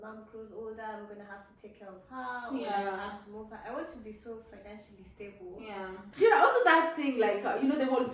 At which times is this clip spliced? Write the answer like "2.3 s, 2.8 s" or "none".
6.1 s